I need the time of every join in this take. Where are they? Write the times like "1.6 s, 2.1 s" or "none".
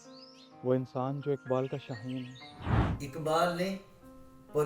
2.8 s